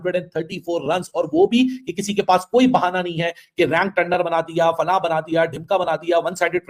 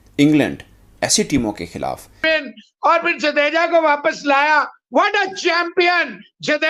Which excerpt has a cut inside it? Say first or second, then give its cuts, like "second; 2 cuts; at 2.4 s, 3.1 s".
second; 1 cut; at 2.2 s